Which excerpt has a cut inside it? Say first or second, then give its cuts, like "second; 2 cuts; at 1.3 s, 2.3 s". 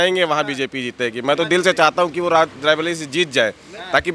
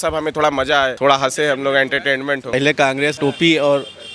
second; 2 cuts; at 0.9 s, 2.8 s